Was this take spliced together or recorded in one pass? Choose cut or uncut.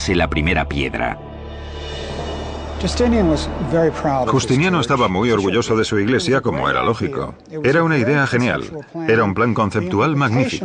uncut